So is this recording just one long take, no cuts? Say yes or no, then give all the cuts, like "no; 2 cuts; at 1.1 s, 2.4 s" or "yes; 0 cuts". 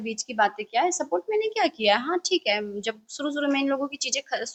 yes; 0 cuts